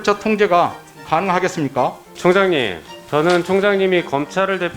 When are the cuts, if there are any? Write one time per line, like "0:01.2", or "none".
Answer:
0:02.1